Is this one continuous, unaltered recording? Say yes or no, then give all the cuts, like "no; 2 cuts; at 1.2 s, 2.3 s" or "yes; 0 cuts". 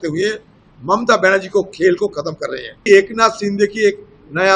no; 1 cut; at 2.8 s